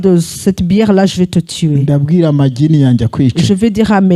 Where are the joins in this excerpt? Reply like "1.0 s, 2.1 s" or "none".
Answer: none